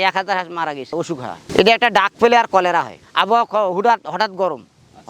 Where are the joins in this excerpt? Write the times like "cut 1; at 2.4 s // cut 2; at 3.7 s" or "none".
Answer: cut 1; at 1.4 s // cut 2; at 3.0 s